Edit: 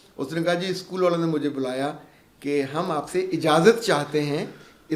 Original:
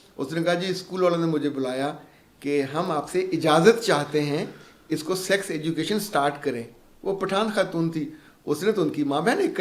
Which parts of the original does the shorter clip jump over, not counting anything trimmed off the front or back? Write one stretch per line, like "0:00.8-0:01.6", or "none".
none